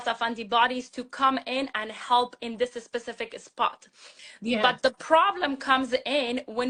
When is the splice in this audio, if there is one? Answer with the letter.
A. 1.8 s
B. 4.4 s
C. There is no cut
C